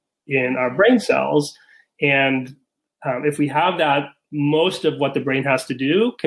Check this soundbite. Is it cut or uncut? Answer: uncut